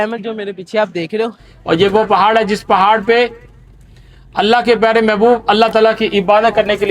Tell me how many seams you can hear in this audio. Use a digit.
1